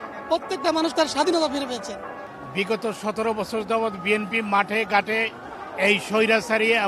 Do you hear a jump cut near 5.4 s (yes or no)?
no